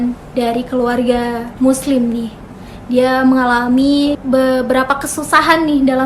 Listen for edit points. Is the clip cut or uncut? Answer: uncut